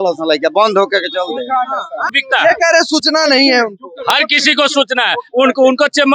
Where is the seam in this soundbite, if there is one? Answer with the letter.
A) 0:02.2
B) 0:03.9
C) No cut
A